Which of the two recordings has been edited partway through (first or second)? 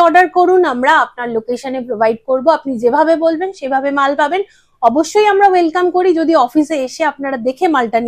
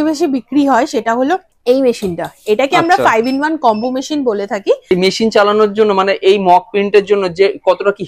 second